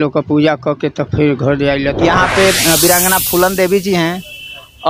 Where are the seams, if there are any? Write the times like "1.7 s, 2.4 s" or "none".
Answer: 2.0 s